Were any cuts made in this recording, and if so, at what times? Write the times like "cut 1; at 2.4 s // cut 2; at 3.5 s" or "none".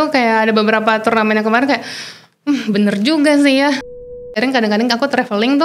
cut 1; at 3.9 s